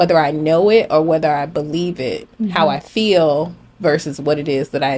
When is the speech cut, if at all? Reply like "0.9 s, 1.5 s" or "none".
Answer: none